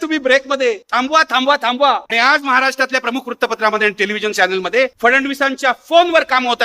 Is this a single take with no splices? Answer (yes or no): no